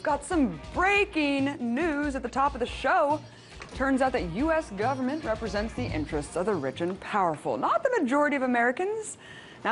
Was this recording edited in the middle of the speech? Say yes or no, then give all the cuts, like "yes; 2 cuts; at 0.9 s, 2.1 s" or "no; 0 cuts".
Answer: no; 0 cuts